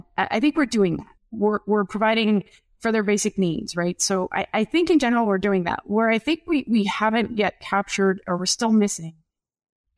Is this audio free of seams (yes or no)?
no